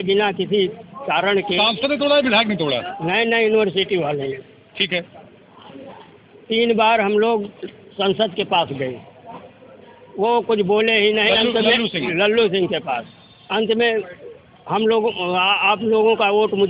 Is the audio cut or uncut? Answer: uncut